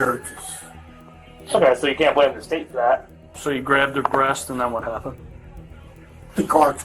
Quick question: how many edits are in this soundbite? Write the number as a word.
one